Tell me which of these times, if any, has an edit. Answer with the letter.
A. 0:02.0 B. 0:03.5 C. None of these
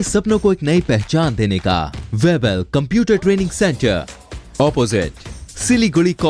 A